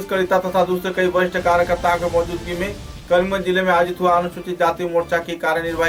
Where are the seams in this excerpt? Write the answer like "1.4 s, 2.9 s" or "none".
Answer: none